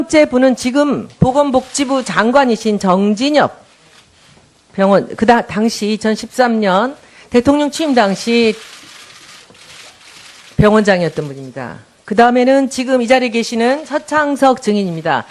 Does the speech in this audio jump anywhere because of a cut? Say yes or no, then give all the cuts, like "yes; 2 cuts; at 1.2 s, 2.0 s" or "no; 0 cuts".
yes; 1 cut; at 11.3 s